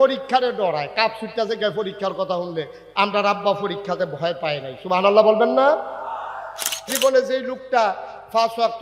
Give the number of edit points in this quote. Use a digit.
1